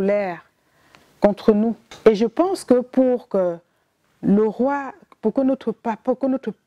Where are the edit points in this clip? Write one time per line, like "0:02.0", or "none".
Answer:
0:01.9